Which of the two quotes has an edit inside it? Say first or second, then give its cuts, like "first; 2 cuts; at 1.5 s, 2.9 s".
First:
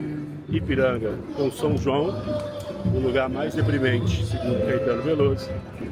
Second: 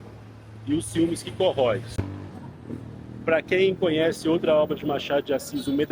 second; 1 cut; at 1.9 s